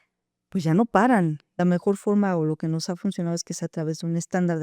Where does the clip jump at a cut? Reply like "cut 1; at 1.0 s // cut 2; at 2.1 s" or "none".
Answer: cut 1; at 1.6 s